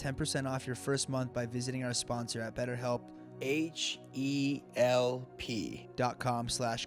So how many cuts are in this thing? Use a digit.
2